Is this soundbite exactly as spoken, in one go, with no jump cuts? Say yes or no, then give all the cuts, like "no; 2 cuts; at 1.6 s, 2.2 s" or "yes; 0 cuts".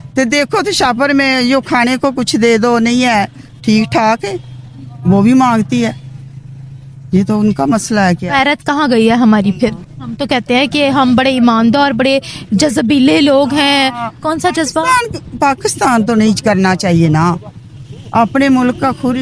yes; 0 cuts